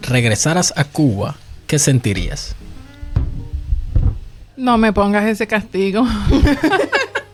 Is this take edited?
no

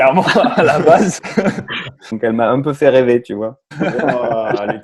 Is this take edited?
yes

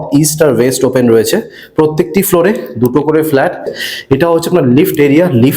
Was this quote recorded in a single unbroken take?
no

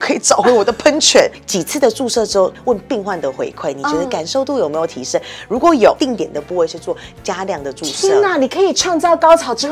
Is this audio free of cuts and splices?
no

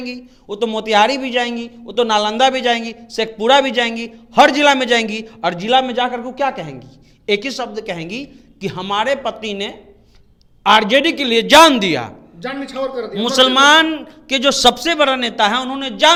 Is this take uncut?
yes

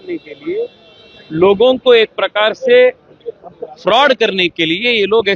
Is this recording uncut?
yes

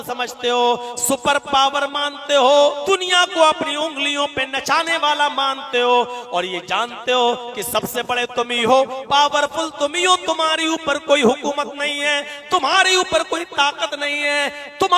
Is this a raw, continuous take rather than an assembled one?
no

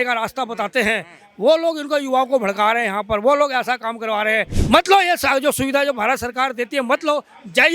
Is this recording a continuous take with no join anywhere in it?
no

